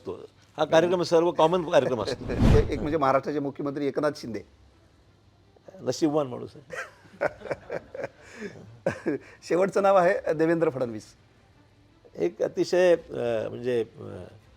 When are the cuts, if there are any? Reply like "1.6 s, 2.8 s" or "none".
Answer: 2.5 s